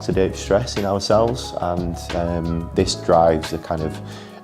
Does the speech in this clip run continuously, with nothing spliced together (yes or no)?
yes